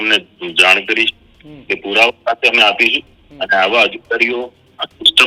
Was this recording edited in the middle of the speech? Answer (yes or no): no